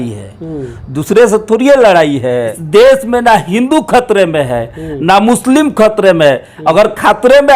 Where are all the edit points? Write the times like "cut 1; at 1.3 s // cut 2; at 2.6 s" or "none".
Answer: cut 1; at 2.6 s